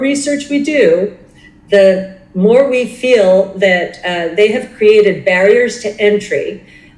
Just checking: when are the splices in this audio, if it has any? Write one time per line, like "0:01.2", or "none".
none